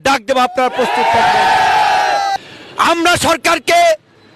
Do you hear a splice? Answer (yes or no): yes